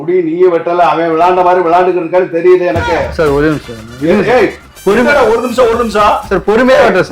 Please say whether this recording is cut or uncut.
uncut